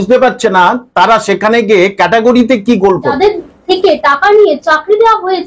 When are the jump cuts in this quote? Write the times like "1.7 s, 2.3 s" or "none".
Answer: 3.1 s